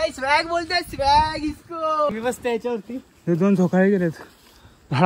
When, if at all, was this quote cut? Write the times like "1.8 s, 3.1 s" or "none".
2.1 s